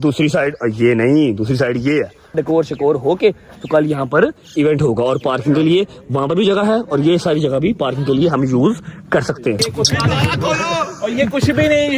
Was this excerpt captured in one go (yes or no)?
no